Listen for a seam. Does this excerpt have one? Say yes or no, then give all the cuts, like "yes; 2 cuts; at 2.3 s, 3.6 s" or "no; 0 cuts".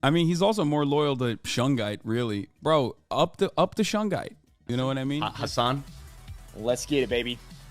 yes; 1 cut; at 5.2 s